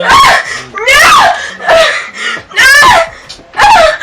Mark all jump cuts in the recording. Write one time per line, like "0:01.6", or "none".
0:01.6

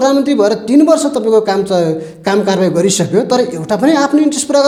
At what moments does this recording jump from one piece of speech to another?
none

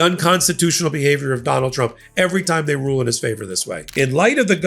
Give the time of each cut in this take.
0:03.8

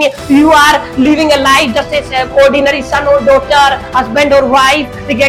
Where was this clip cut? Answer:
none

